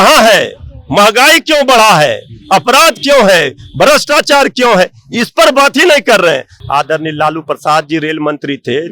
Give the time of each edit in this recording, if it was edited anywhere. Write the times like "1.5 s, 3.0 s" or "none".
6.5 s